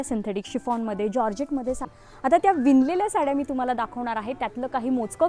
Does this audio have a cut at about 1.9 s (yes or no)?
yes